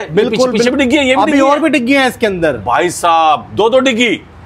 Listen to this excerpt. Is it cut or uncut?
uncut